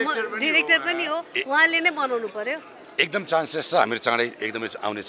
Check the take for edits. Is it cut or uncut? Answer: uncut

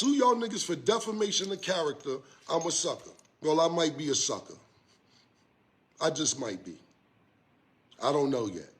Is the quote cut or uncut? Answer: uncut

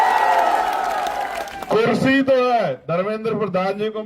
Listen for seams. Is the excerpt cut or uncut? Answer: cut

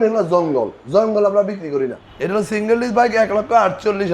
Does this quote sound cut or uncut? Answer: cut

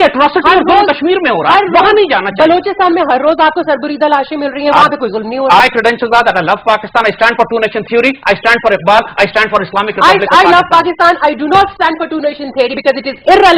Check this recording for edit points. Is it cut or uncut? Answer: cut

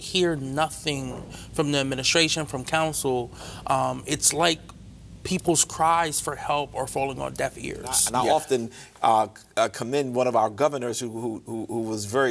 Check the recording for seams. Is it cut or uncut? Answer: cut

